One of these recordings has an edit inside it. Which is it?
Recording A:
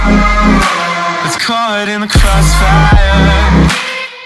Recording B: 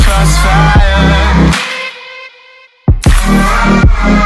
A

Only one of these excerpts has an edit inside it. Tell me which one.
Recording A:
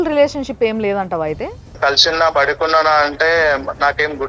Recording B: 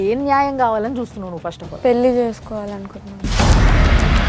A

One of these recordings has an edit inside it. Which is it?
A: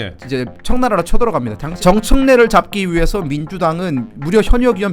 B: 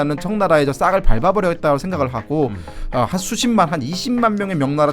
A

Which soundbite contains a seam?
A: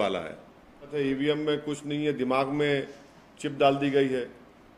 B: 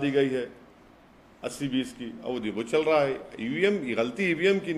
A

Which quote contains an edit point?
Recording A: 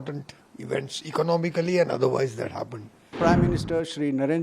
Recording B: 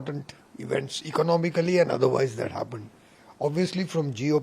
A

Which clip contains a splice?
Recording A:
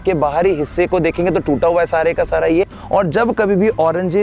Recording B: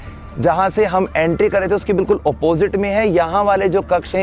A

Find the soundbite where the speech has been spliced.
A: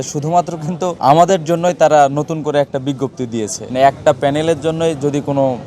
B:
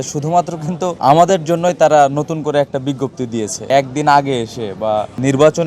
A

